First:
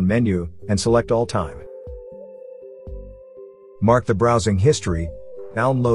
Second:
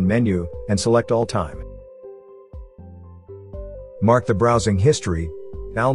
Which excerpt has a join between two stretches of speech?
first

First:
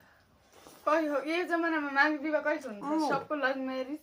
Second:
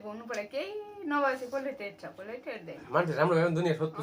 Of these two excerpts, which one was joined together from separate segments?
second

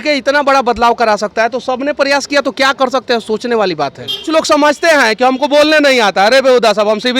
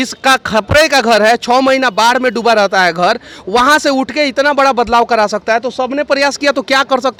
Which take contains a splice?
first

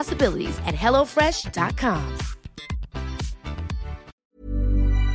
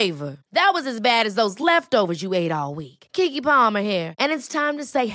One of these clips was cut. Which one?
first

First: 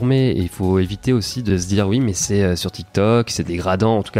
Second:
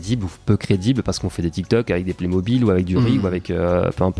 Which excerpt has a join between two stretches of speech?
first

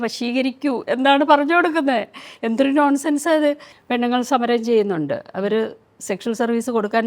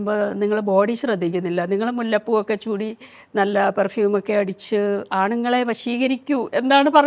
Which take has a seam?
first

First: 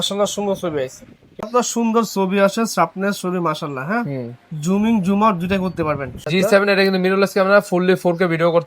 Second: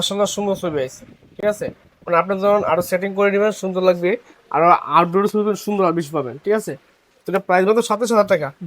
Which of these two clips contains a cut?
first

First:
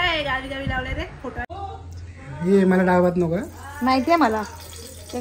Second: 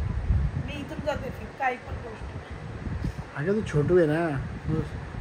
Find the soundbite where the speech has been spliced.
first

